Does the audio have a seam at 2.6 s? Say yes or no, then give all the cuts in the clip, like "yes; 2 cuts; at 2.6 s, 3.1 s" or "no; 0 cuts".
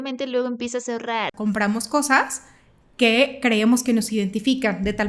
no; 1 cut; at 1.3 s